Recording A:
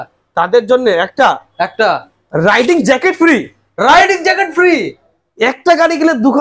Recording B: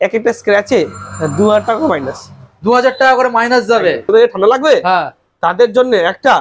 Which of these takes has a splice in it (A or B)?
B